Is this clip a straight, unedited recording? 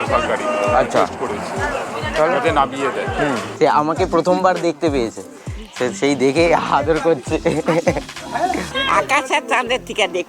no; 2 cuts; at 3.5 s, 8.8 s

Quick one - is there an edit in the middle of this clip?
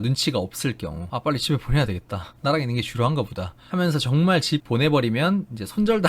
yes; 1 cut; at 1.0 s

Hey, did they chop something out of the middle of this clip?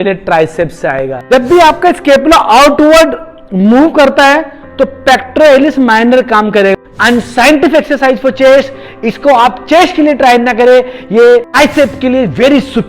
yes; 4 cuts; at 1.2 s, 6.7 s, 8.9 s, 11.5 s

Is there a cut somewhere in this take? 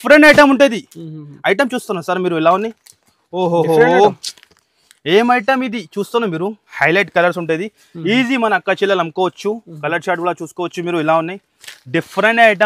yes; 1 cut; at 6.7 s

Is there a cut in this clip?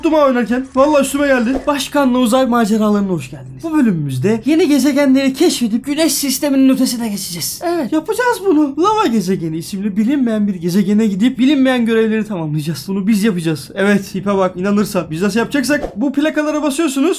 yes; 2 cuts; at 1.6 s, 15.9 s

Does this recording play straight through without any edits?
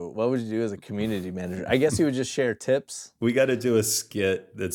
no; 1 cut; at 3.0 s

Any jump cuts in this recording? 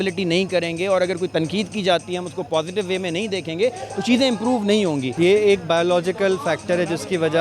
yes; 1 cut; at 5.1 s

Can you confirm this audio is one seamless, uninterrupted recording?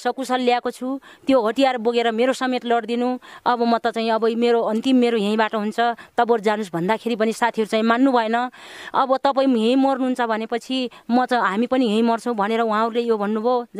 yes; 0 cuts

